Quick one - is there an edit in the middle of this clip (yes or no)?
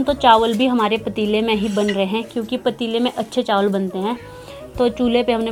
no